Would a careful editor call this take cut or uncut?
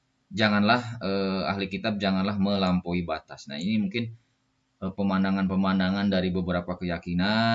uncut